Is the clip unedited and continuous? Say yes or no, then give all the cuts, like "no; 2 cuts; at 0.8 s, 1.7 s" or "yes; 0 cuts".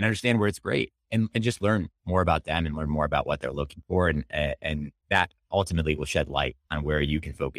no; 1 cut; at 4.9 s